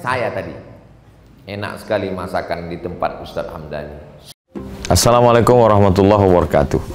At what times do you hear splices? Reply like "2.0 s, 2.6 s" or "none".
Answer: 4.3 s